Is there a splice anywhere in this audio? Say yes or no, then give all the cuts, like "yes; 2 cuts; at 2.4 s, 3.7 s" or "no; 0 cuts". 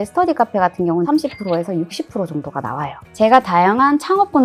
yes; 2 cuts; at 1.1 s, 3.0 s